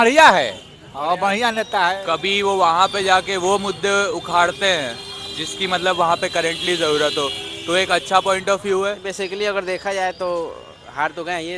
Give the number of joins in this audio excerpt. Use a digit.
2